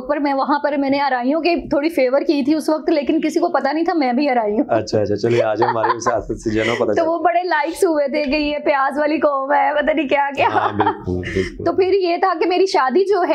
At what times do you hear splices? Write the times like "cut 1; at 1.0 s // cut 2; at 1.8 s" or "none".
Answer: none